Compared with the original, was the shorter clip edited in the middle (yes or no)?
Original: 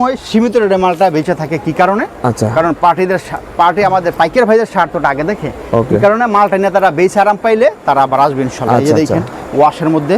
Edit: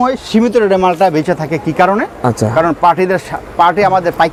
no